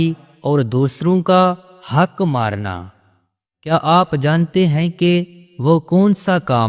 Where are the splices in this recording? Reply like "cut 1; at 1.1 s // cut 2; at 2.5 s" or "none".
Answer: cut 1; at 3.7 s